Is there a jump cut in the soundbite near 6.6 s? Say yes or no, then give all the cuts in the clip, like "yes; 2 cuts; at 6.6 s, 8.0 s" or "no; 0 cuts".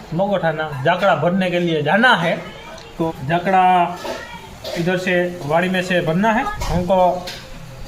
yes; 2 cuts; at 3.1 s, 6.6 s